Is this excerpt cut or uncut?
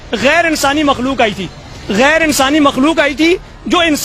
uncut